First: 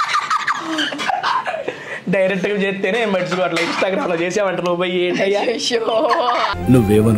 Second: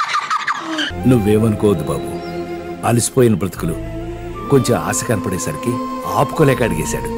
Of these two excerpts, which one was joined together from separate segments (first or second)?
second